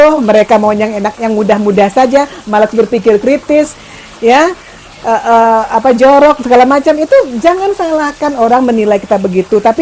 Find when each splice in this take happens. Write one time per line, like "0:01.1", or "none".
none

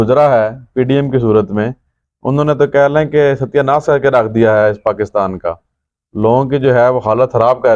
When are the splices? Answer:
none

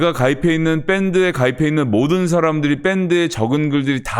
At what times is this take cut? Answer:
none

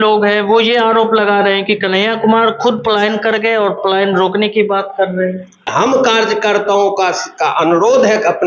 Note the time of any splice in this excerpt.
0:05.7

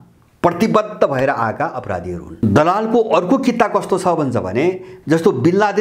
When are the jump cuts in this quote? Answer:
0:02.2
0:04.9

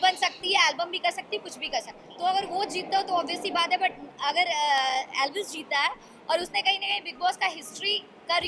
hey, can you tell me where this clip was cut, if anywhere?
0:02.0

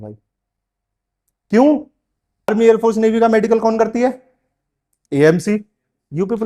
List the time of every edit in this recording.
0:02.5

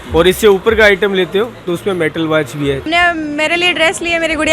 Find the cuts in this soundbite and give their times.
0:02.8

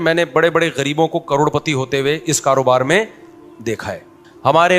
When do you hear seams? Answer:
0:03.8

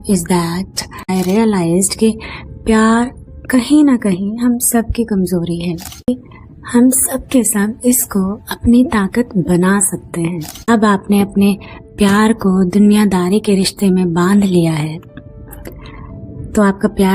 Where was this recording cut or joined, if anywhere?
0:01.1
0:06.1
0:10.5

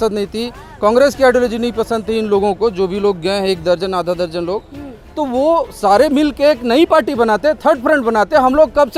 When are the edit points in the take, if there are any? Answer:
none

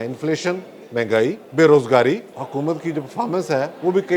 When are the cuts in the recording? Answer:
0:01.4
0:02.3

